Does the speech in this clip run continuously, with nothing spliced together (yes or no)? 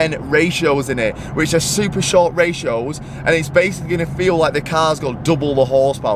yes